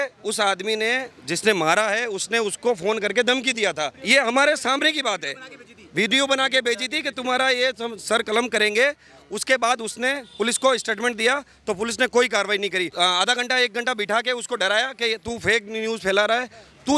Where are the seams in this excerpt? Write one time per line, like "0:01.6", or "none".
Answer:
0:04.0
0:12.9